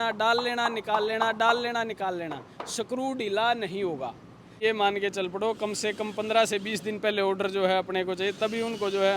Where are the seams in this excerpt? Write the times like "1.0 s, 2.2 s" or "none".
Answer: 4.6 s